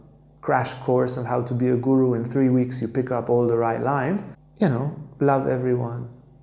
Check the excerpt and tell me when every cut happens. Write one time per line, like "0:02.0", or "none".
0:04.4